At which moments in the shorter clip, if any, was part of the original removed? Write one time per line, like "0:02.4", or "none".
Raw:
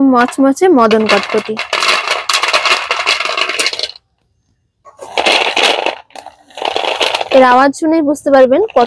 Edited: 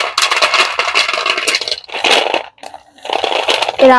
0:02.0